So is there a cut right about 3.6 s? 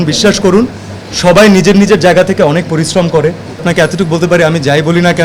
yes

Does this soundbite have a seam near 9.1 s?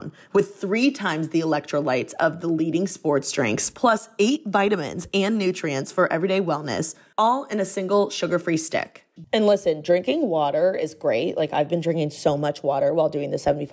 yes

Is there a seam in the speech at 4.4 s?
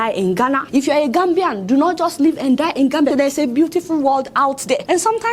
no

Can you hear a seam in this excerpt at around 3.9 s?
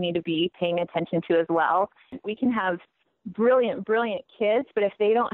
no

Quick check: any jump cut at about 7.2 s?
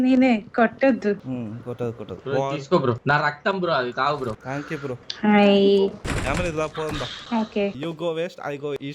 yes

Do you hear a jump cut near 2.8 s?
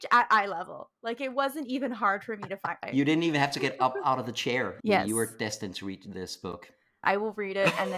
yes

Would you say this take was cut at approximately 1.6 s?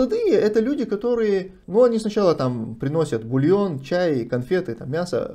yes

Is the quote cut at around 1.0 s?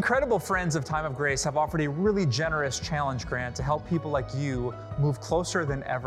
no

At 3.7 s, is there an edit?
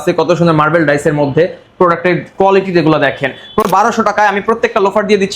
yes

